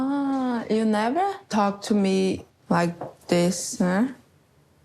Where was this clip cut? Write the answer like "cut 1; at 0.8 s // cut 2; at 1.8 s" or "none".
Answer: cut 1; at 1.4 s // cut 2; at 2.5 s